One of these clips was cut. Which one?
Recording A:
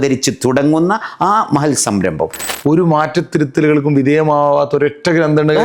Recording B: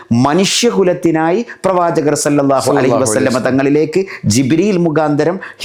A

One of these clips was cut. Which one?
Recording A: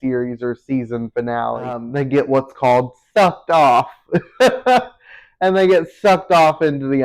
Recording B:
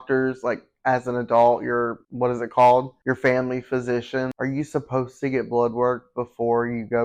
A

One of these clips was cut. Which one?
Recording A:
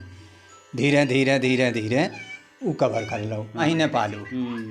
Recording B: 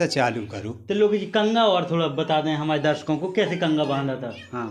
A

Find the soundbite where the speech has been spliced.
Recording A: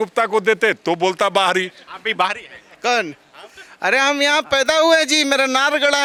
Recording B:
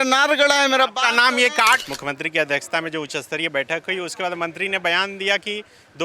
B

